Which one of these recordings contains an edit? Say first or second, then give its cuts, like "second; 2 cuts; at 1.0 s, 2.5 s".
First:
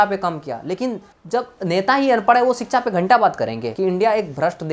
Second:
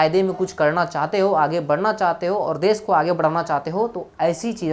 first; 2 cuts; at 1.1 s, 3.7 s